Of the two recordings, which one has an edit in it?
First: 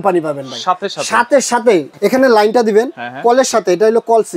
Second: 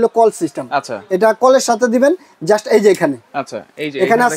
first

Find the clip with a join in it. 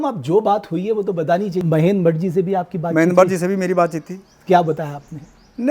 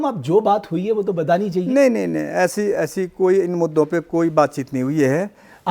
first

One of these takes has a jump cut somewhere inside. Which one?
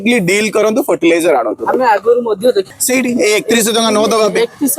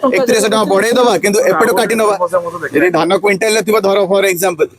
first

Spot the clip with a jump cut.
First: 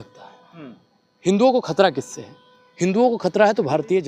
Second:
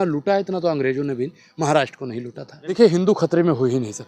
second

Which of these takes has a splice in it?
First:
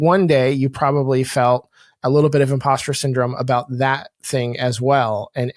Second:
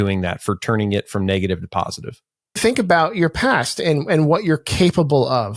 second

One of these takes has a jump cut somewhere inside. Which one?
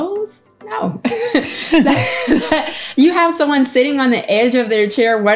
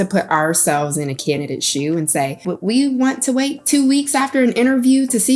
second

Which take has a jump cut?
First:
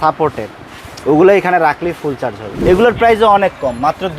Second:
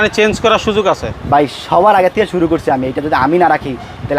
first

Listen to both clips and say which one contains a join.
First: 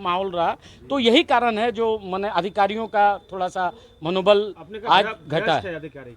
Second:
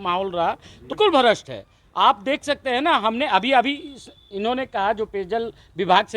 second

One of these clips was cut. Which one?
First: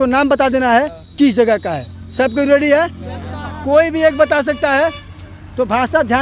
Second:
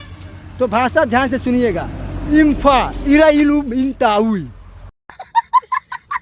second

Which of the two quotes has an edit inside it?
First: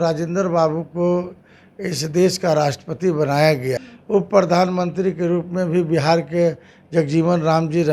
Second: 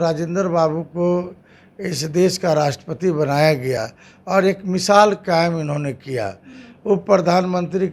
first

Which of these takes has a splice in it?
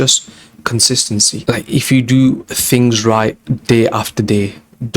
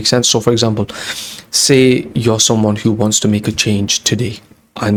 first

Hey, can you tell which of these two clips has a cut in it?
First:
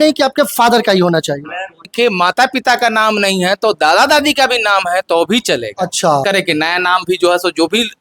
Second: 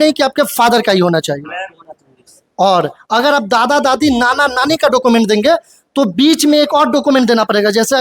first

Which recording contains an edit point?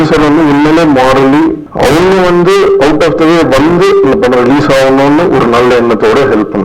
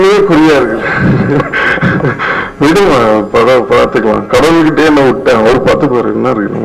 first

